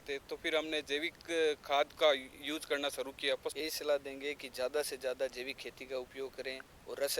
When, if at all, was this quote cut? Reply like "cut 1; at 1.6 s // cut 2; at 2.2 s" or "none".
cut 1; at 3.5 s